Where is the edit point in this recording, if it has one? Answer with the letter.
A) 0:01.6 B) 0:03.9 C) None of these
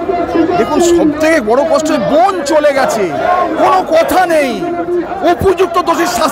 C